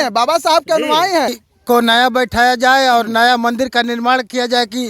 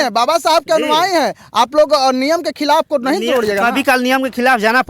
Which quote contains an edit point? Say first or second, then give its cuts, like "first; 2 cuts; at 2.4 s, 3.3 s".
first; 1 cut; at 1.4 s